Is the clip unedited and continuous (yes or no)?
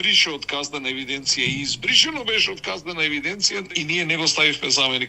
no